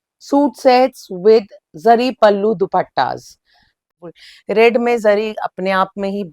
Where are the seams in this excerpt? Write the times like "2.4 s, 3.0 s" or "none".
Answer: 3.9 s

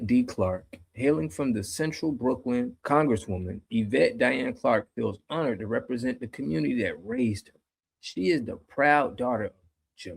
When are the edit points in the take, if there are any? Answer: 2.8 s

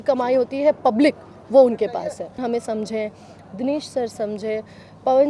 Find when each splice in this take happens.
2.4 s

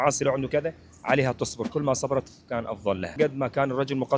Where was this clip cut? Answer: 3.1 s

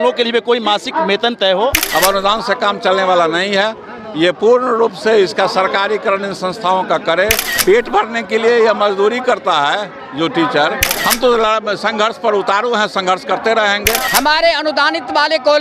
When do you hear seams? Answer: 1.8 s, 7.5 s, 11.0 s, 14.0 s

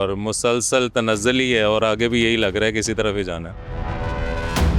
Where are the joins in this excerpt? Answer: 3.7 s

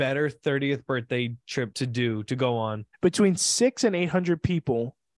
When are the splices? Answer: 1.7 s, 2.9 s

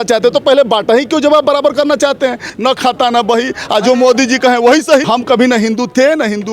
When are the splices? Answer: 2.5 s, 5.1 s

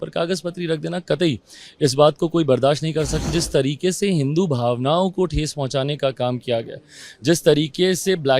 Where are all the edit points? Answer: 3.3 s

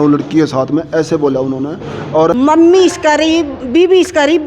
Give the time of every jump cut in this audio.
2.3 s

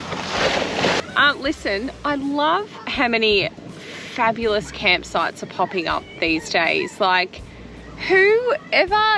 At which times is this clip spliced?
1.0 s

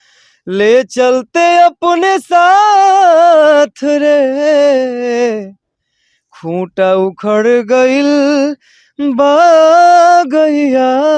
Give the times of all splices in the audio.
none

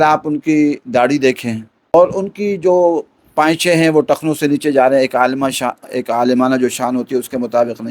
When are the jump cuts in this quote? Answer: 1.9 s

